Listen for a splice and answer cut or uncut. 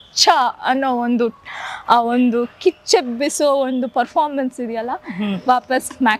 uncut